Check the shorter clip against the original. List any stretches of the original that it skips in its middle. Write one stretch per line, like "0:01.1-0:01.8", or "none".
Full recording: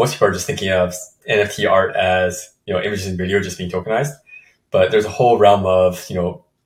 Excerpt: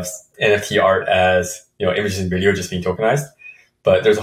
none